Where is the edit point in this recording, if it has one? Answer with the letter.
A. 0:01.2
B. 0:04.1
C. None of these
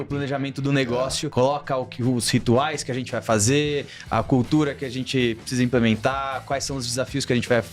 A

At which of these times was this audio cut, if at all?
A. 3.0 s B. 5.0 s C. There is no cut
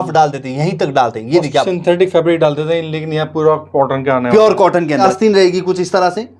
B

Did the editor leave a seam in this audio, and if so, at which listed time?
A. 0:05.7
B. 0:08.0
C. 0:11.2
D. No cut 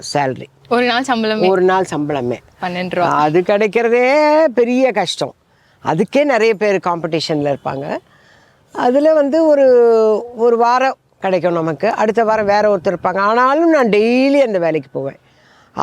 D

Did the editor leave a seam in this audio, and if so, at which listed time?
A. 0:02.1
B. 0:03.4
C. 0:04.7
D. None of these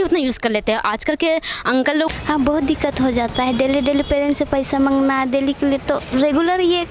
A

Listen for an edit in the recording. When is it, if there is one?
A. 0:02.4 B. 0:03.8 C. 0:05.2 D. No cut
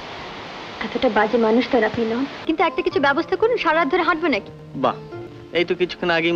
A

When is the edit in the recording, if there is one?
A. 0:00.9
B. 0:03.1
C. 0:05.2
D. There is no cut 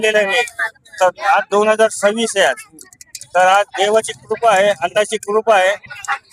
D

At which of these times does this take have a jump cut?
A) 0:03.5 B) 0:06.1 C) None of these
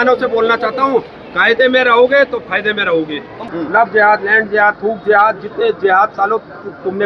A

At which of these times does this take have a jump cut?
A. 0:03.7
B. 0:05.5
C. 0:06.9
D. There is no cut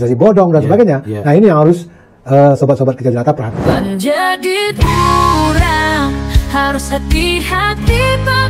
A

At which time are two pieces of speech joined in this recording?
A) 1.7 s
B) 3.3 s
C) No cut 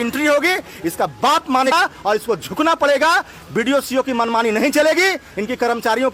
A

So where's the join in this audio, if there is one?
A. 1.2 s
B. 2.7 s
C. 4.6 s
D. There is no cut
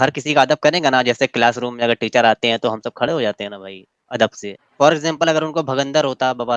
C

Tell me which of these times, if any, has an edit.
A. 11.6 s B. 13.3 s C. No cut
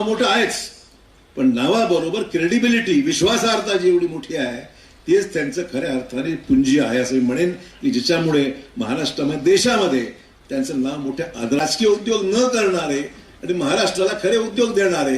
A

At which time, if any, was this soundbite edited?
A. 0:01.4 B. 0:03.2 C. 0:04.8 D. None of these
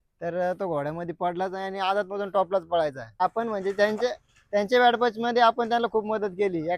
B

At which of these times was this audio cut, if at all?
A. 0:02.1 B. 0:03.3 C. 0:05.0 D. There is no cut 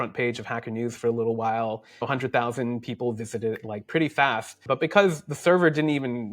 A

